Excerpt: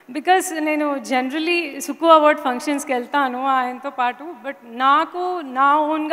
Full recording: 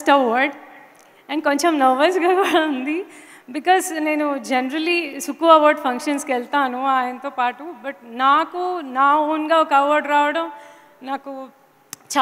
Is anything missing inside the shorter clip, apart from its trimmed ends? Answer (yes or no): no